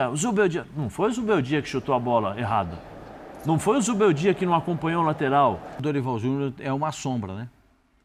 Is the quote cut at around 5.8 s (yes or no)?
yes